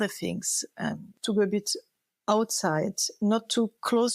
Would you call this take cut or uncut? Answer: cut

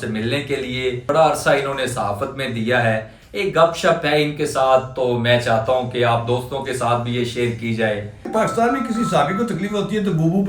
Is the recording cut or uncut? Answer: cut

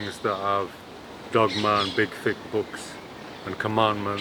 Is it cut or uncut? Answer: uncut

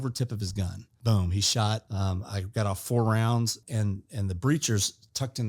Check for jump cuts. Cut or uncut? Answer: cut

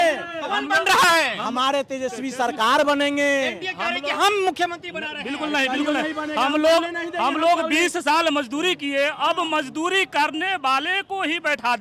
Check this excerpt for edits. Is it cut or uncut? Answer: uncut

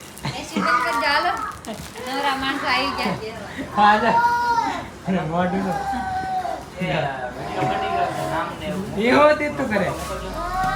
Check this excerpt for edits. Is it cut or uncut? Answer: uncut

